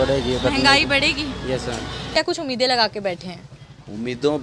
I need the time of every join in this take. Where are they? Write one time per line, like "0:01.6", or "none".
0:02.1